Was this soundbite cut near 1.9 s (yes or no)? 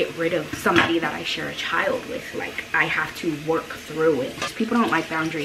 no